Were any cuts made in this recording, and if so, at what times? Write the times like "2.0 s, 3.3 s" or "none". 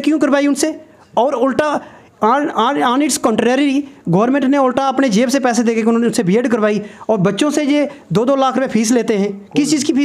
none